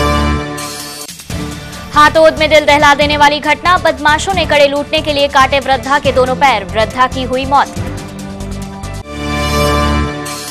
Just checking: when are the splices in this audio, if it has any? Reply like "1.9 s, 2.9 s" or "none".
0.9 s